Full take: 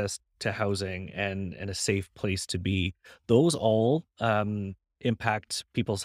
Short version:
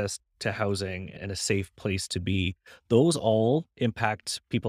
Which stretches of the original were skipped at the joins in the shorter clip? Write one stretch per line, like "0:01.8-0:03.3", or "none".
0:01.1-0:01.5
0:04.1-0:04.9